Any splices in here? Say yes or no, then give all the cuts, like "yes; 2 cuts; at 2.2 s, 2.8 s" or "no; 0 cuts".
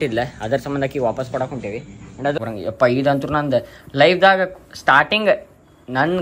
yes; 1 cut; at 2.4 s